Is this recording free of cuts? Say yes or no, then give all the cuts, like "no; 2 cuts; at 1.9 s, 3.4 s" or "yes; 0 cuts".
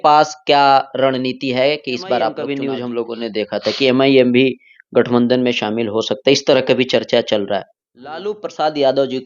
no; 2 cuts; at 2.5 s, 8.3 s